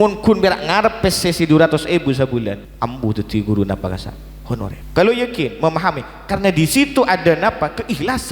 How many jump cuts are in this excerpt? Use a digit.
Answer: 2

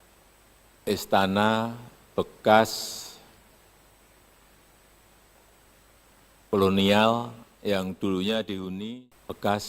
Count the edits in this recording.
1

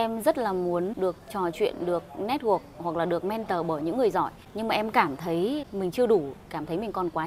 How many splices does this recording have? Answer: 3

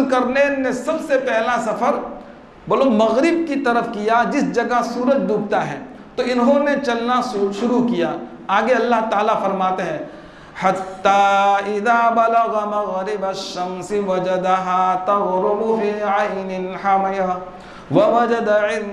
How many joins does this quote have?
0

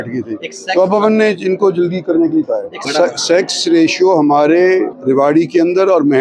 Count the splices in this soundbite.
2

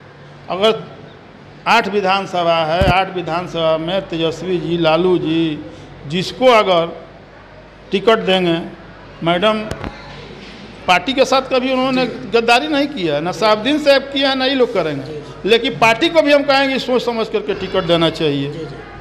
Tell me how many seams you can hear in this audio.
0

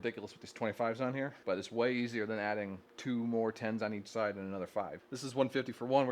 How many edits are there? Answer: 3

